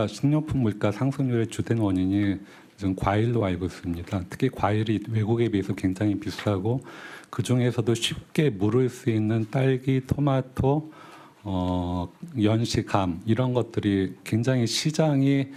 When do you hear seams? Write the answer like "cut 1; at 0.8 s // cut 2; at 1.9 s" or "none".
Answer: none